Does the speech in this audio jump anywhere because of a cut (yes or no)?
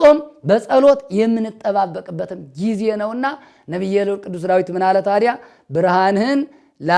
no